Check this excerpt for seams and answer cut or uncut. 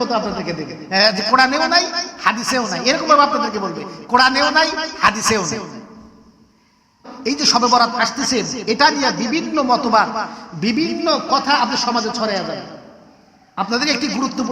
cut